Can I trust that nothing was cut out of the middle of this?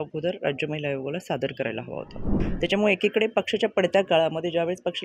no; 1 cut; at 2.2 s

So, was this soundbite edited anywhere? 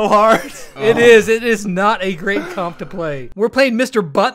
yes; 1 cut; at 3.3 s

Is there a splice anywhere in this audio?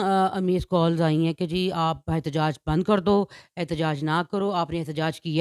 no; 0 cuts

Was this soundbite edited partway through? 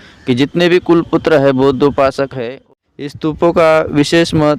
yes; 1 cut; at 2.4 s

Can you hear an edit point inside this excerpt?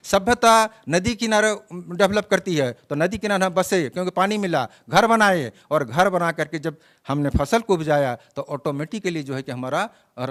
no; 0 cuts

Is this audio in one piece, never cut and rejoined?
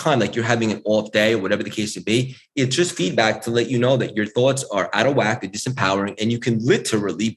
yes; 0 cuts

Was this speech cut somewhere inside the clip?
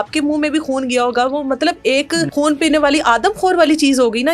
yes; 1 cut; at 2.3 s

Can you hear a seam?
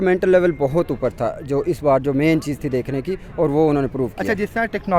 no; 0 cuts

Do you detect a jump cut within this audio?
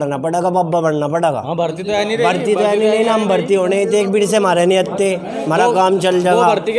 no; 0 cuts

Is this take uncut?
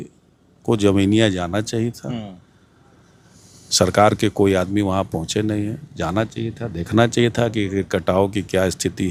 yes; 0 cuts

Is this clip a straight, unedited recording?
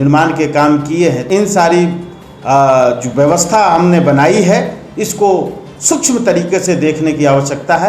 no; 1 cut; at 1.2 s

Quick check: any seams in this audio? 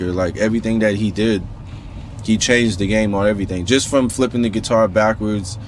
no; 0 cuts

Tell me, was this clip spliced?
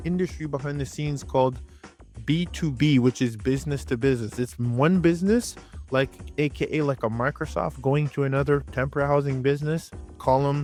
no; 0 cuts

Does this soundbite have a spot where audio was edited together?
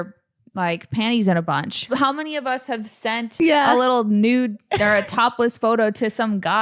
yes; 2 cuts; at 1.9 s, 3.3 s

